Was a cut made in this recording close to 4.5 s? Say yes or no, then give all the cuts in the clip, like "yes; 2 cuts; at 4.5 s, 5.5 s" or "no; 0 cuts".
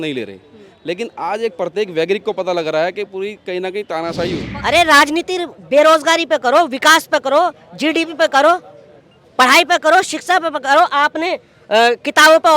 yes; 1 cut; at 4.5 s